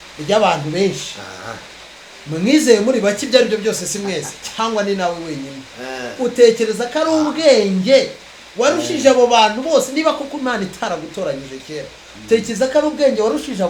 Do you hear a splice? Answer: no; 0 cuts

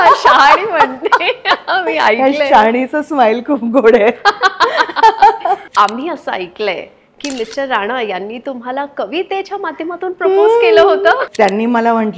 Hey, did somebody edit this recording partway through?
yes; 2 cuts; at 5.7 s, 11.2 s

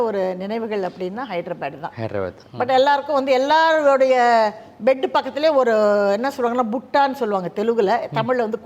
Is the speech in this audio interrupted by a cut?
yes; 1 cut; at 2.4 s

